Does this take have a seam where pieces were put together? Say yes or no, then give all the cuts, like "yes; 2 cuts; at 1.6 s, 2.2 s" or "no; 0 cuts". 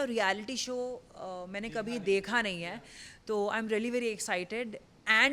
no; 0 cuts